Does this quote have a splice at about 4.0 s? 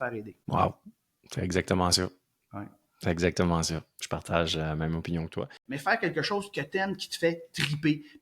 no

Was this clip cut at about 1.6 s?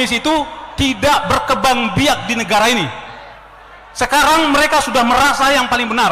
no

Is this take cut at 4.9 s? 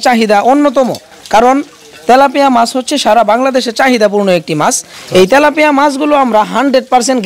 yes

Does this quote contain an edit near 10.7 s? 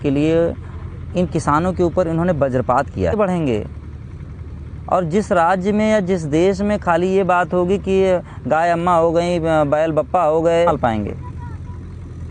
yes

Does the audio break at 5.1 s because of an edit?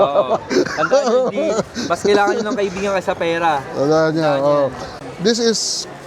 yes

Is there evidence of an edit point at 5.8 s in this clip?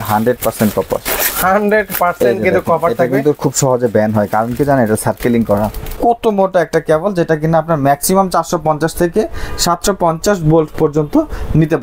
yes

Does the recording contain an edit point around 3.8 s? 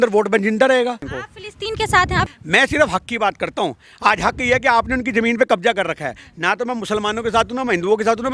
no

